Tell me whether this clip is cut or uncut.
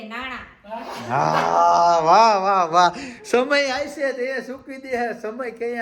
uncut